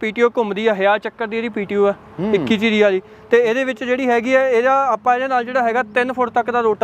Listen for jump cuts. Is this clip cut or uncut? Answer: uncut